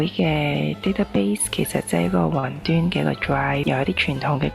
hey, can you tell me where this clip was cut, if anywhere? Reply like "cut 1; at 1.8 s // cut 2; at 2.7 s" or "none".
cut 1; at 3.6 s